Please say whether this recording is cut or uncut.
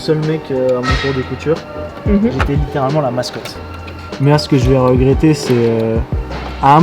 cut